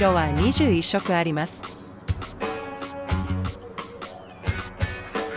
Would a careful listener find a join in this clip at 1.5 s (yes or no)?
yes